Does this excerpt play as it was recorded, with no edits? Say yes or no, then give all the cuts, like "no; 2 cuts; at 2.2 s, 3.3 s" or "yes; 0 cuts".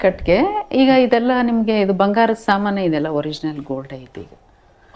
yes; 0 cuts